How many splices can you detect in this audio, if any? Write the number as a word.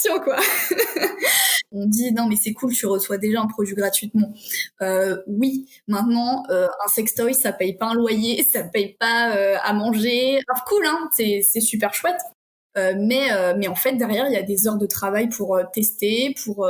one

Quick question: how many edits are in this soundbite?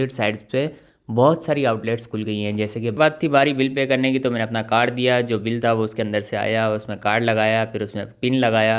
one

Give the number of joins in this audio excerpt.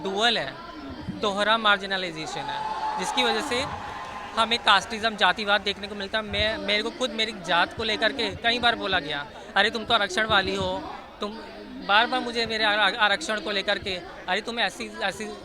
zero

